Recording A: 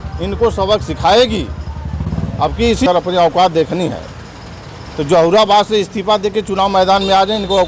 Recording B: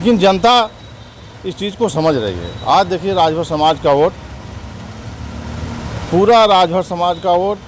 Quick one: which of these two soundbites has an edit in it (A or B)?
A